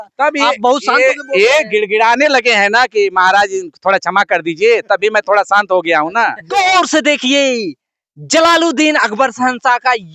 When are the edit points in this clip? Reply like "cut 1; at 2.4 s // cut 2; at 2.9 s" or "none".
cut 1; at 6.4 s